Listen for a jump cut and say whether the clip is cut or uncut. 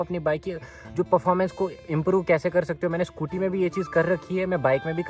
uncut